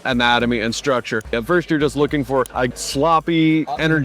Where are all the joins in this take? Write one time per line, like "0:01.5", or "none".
0:01.3
0:02.6